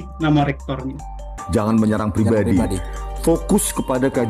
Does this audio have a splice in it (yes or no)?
yes